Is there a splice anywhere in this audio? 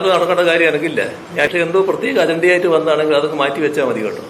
yes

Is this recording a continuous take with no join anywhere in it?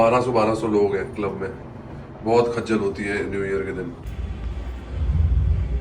yes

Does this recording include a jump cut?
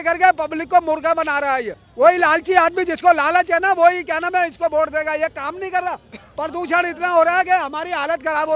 yes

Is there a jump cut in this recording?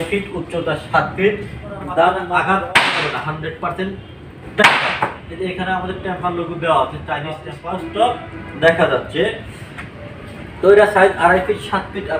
yes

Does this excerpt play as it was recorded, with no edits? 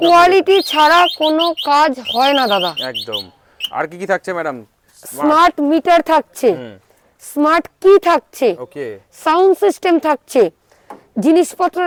yes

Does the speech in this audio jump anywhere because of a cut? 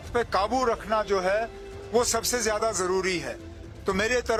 no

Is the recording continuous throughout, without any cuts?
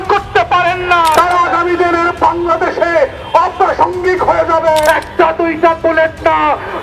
no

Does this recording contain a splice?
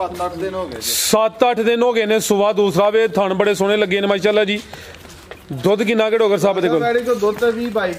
no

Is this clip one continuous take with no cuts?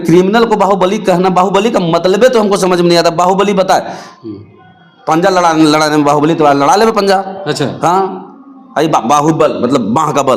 yes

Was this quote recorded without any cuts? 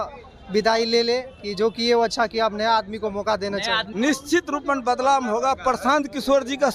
no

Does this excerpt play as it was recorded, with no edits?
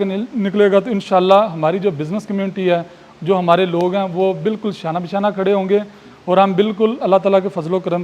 yes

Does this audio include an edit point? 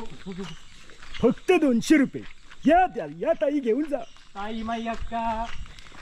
no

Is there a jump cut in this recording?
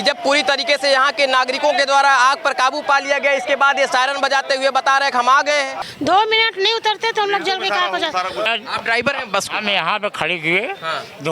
yes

